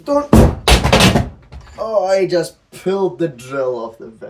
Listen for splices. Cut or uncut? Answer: uncut